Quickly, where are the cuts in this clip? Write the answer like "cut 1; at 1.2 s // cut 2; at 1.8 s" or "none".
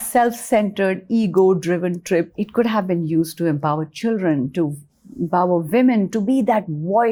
none